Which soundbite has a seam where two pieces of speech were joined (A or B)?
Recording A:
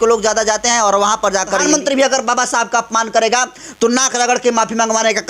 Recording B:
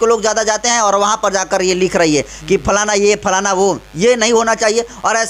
A